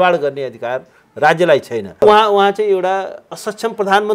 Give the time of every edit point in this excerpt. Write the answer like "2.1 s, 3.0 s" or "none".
2.0 s